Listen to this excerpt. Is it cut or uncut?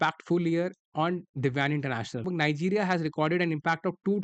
cut